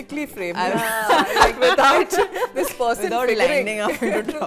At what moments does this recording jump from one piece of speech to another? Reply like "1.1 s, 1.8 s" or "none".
none